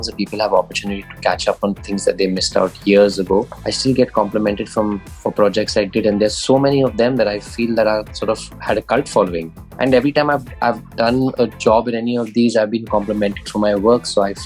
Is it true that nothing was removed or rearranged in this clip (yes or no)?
no